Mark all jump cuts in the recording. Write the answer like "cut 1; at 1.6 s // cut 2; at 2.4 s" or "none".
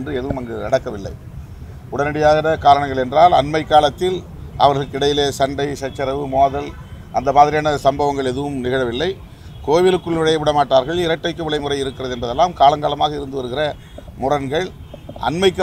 none